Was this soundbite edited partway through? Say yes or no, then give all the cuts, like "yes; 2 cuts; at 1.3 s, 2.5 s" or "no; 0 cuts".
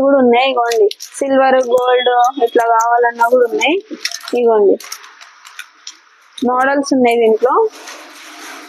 no; 0 cuts